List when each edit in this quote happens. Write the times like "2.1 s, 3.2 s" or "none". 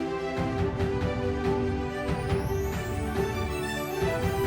3.5 s